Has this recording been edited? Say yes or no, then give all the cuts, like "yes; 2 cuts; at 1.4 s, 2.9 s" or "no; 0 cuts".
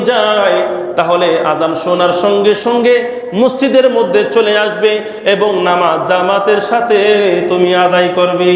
no; 0 cuts